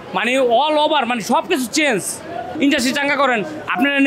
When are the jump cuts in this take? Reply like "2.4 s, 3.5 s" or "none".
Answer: 2.4 s